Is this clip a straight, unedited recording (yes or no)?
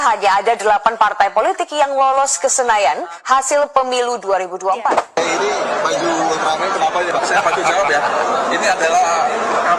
no